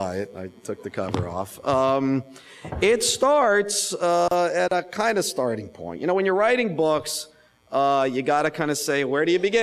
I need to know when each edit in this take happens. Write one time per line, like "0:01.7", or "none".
0:04.2